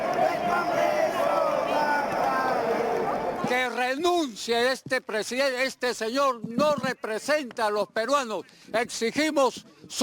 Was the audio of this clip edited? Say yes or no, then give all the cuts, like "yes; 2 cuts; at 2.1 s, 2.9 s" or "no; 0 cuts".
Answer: yes; 1 cut; at 3.3 s